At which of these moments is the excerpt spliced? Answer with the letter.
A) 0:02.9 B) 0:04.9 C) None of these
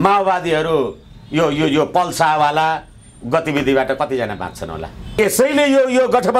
C